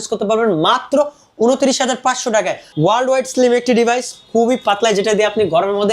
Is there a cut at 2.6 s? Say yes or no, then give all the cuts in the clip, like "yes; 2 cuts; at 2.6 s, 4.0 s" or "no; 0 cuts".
yes; 1 cut; at 2.6 s